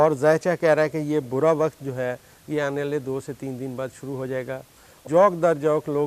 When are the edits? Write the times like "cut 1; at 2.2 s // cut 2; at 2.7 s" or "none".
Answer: cut 1; at 5.0 s